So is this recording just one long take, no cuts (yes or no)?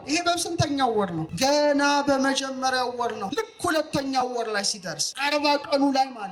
no